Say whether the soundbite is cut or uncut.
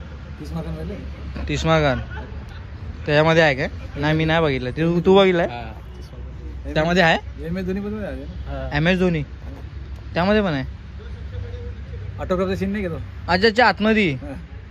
uncut